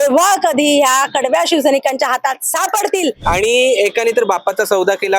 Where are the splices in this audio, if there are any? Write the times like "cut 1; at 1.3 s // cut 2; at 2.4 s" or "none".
cut 1; at 3.2 s

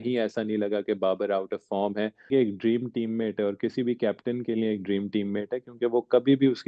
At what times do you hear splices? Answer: cut 1; at 2.3 s

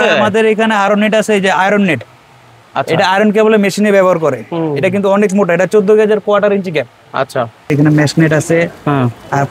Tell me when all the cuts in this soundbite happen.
cut 1; at 7.7 s

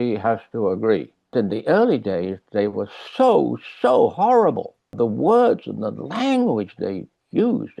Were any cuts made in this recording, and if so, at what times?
cut 1; at 1.3 s // cut 2; at 4.9 s

